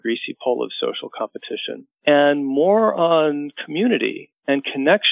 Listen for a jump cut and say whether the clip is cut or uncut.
cut